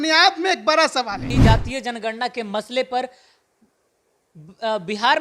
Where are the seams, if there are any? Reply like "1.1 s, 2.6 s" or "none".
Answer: 1.3 s